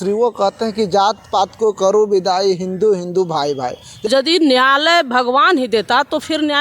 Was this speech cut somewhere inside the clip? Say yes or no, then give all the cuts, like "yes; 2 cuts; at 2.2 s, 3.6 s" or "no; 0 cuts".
yes; 1 cut; at 4.1 s